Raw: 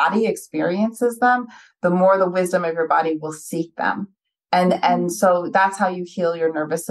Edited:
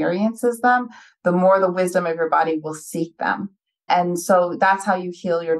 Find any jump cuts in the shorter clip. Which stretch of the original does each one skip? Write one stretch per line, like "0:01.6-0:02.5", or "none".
0:04.4-0:04.8